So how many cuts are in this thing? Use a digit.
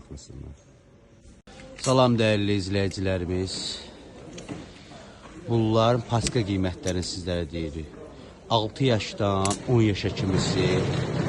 1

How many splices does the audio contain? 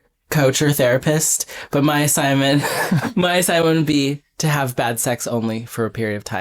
1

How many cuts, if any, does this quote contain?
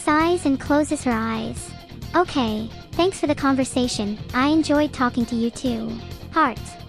0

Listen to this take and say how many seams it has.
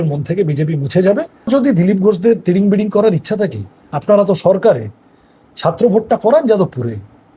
1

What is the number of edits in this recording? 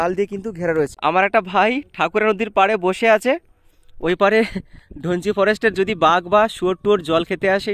1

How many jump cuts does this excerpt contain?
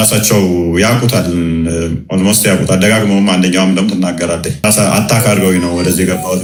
0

